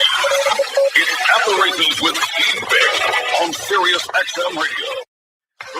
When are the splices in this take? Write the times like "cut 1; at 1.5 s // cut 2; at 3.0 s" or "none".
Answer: cut 1; at 4.0 s

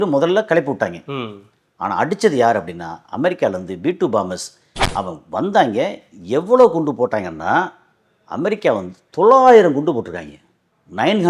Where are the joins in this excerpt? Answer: cut 1; at 4.8 s

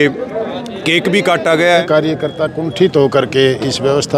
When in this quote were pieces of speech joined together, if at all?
cut 1; at 1.7 s

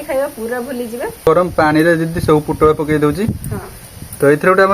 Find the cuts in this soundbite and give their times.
cut 1; at 1.3 s

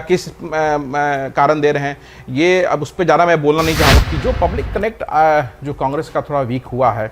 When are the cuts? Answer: cut 1; at 3.9 s

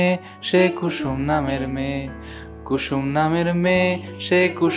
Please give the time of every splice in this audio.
none

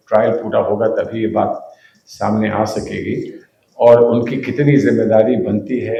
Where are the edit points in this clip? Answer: none

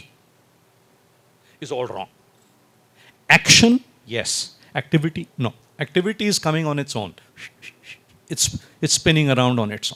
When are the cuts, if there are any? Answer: none

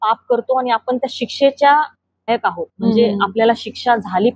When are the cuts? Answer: cut 1; at 2.3 s

